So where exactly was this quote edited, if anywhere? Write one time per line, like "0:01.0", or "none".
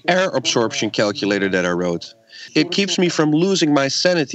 0:02.3